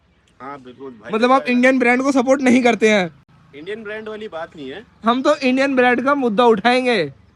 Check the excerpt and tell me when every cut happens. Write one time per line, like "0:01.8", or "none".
none